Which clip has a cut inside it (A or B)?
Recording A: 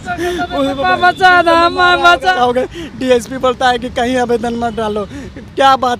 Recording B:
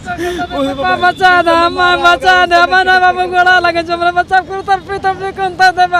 A